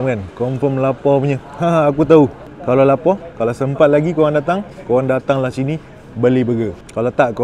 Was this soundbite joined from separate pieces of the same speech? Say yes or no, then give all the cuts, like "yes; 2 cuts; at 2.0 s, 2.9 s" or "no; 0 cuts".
no; 0 cuts